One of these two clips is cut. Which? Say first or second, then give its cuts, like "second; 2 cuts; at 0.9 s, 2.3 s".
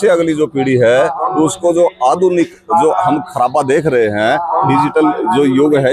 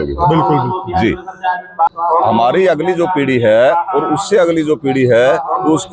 second; 1 cut; at 1.9 s